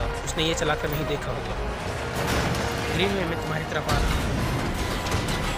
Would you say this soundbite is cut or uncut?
uncut